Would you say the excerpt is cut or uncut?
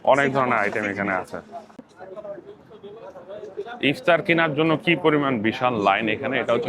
cut